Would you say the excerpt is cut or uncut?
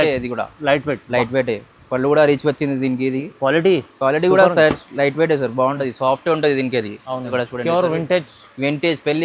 cut